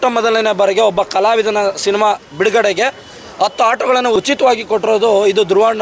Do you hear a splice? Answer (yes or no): yes